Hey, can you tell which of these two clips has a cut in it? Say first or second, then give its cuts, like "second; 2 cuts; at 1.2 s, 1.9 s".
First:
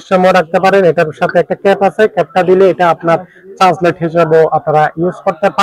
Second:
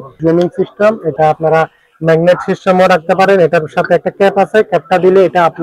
second; 1 cut; at 1.2 s